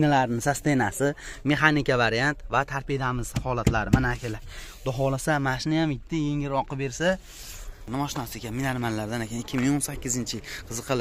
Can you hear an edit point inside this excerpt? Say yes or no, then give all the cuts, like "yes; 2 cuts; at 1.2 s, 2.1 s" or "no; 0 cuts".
yes; 1 cut; at 7.8 s